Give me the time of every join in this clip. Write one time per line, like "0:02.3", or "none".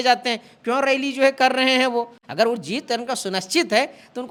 none